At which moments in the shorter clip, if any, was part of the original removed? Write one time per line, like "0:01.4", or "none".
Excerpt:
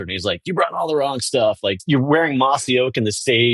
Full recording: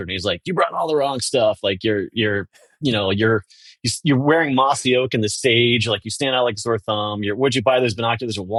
0:01.8